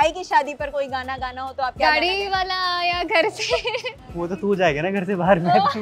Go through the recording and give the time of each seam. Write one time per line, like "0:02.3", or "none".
0:04.0